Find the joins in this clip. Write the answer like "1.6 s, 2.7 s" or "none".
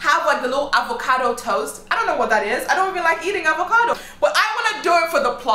3.9 s